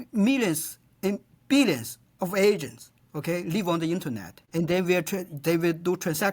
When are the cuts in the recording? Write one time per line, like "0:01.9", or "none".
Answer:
0:04.5